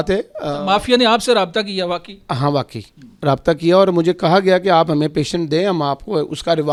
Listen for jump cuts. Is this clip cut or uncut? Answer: uncut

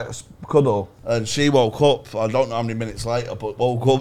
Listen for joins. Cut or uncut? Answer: cut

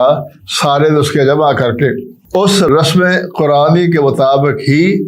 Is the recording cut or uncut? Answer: cut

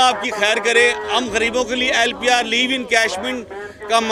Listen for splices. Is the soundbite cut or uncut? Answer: uncut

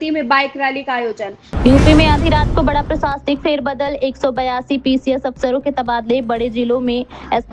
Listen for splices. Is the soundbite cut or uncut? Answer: cut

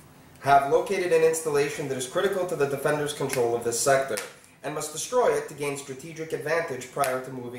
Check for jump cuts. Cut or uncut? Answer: cut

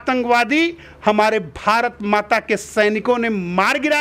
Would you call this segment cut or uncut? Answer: uncut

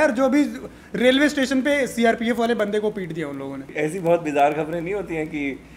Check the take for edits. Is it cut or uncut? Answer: cut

